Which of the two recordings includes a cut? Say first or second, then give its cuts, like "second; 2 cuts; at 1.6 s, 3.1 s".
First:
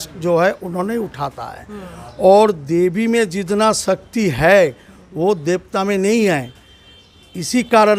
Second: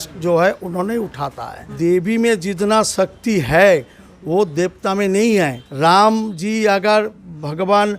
second; 2 cuts; at 1.7 s, 5.6 s